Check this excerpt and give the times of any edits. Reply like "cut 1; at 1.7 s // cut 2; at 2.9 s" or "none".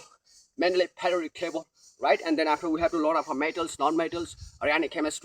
none